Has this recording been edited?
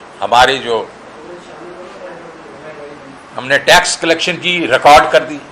no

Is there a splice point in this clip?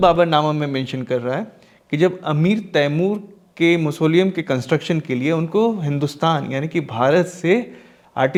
no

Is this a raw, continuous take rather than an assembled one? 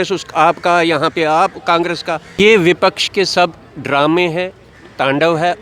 no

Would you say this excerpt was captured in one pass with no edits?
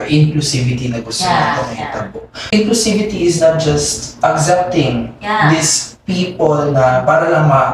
no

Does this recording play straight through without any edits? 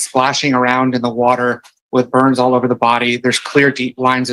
yes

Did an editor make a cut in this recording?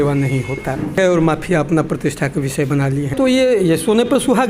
yes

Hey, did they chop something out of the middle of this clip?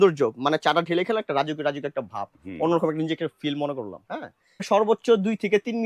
yes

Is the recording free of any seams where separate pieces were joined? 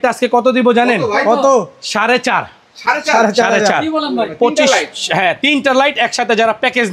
yes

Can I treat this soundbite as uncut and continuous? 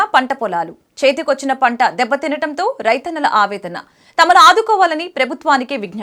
yes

